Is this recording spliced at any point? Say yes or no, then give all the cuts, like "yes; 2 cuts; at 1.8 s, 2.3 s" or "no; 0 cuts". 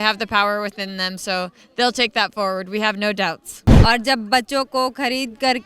yes; 1 cut; at 3.7 s